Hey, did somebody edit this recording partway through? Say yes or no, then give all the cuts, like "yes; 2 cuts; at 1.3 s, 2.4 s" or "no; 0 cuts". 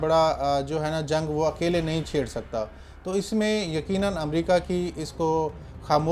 no; 0 cuts